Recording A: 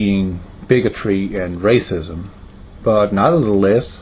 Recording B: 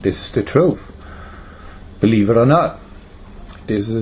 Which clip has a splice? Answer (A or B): B